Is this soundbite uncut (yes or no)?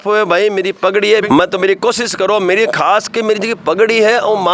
no